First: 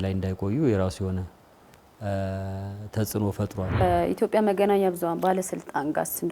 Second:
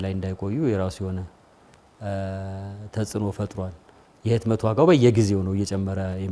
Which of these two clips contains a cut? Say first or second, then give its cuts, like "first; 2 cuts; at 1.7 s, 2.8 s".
first; 1 cut; at 3.8 s